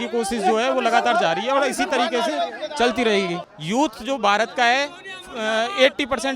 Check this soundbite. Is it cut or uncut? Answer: cut